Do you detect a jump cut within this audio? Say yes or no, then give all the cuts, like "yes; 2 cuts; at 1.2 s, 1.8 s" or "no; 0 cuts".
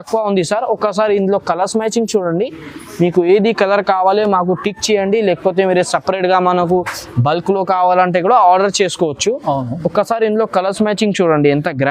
no; 0 cuts